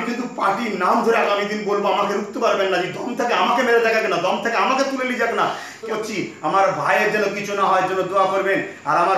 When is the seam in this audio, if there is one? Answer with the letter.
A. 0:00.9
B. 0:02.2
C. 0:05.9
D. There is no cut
C